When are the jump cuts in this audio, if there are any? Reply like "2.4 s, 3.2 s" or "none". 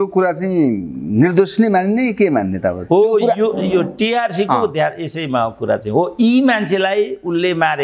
none